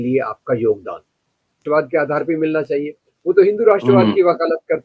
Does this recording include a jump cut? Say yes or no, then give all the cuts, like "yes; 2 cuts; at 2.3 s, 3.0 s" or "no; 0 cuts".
yes; 1 cut; at 1.6 s